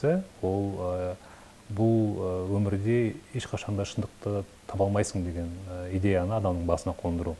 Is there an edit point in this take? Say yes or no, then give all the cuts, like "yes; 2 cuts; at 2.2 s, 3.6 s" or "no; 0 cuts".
no; 0 cuts